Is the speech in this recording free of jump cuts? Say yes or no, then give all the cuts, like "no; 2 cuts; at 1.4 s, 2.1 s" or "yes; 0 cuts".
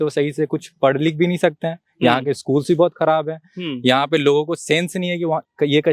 yes; 0 cuts